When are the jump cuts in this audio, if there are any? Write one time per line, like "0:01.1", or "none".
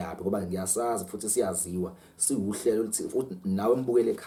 none